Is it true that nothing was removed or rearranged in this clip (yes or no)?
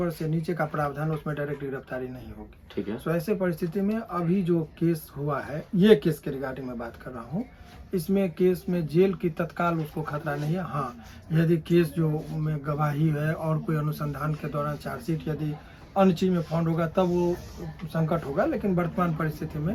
yes